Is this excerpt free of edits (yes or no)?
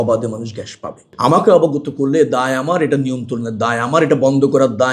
no